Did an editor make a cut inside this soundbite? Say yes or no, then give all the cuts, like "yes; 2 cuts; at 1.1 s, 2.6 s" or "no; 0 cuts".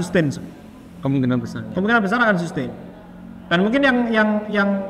no; 0 cuts